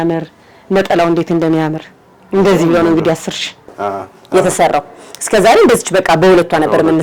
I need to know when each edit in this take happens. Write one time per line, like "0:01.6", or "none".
0:03.8